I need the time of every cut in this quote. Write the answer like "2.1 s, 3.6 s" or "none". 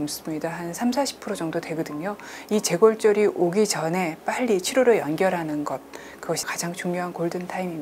6.5 s